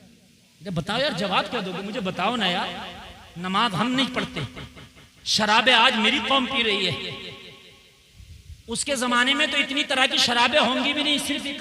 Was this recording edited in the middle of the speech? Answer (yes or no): no